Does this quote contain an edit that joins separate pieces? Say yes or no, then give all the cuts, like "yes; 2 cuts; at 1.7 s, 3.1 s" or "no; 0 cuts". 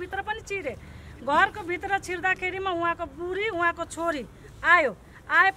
no; 0 cuts